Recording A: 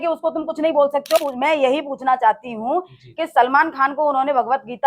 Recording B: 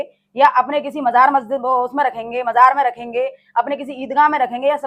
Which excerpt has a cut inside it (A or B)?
A